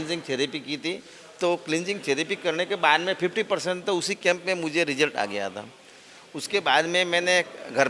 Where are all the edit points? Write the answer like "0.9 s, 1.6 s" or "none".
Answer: none